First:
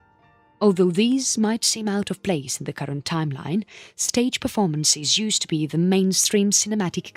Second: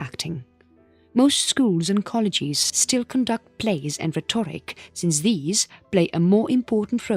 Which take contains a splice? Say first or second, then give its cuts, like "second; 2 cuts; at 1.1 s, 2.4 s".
second; 1 cut; at 2.1 s